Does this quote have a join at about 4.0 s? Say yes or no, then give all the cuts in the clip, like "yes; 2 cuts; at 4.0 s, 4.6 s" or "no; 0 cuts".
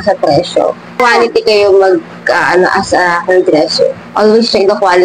yes; 2 cuts; at 1.0 s, 4.0 s